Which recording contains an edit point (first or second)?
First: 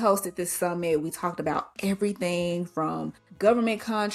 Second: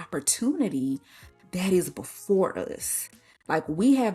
first